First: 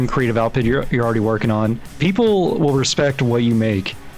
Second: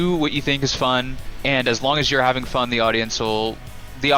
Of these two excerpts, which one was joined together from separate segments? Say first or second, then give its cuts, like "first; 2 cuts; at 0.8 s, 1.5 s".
first; 1 cut; at 1.9 s